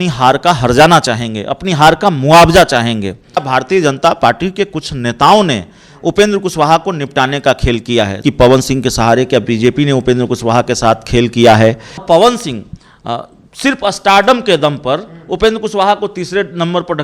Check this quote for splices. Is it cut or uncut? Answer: cut